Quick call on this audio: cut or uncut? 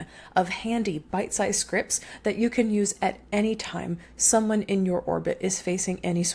uncut